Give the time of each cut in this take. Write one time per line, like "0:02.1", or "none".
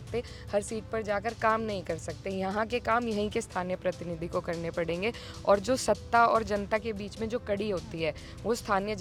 none